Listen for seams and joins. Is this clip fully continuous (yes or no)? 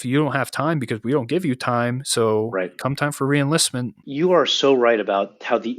no